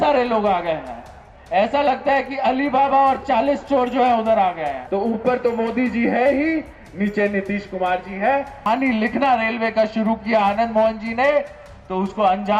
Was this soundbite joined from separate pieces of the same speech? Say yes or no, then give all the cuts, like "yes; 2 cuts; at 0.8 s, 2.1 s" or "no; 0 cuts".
yes; 2 cuts; at 4.8 s, 8.7 s